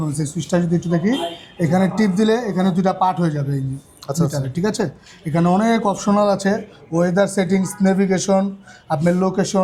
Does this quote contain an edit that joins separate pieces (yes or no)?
no